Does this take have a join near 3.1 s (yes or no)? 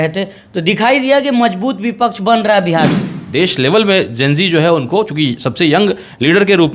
yes